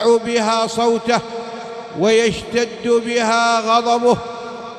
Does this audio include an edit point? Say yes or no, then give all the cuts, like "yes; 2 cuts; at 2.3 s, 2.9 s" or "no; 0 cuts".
no; 0 cuts